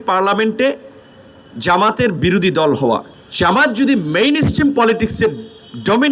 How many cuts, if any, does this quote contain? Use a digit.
1